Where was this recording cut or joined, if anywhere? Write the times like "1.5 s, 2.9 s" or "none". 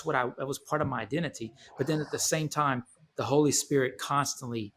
none